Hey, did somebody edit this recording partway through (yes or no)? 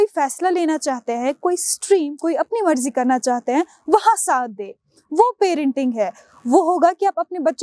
no